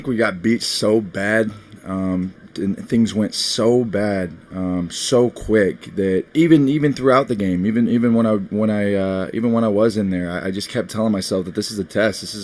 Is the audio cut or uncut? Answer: cut